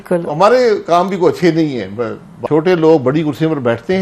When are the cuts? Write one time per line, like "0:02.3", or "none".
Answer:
0:02.3